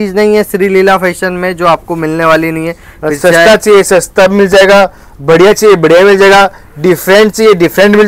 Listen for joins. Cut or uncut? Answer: uncut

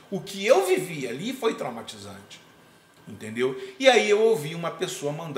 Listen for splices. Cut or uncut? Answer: uncut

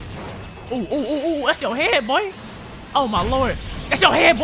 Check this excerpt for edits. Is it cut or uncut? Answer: uncut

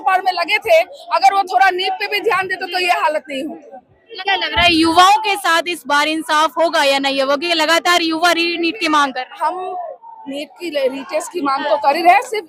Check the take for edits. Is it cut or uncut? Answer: uncut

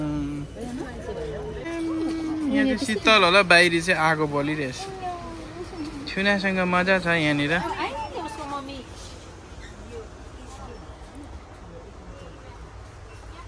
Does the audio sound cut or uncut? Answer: cut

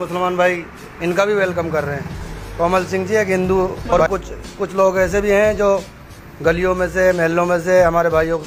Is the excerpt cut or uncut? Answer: cut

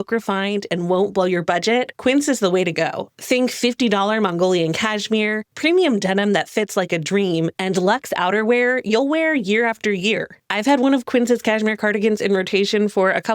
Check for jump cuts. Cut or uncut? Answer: cut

